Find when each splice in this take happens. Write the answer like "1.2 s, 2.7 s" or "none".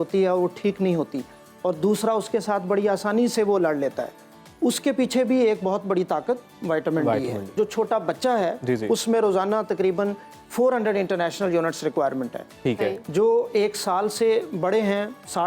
7.5 s